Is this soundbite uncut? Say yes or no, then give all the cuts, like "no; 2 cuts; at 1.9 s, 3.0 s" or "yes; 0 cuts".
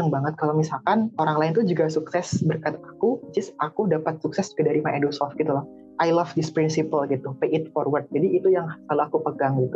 no; 2 cuts; at 1.1 s, 5.8 s